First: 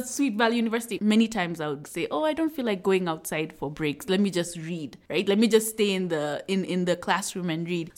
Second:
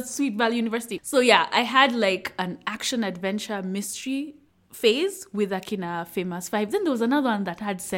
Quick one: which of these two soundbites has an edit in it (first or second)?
first